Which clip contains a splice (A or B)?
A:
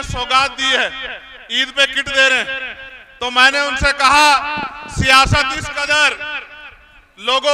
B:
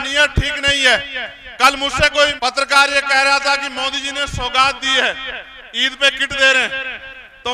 B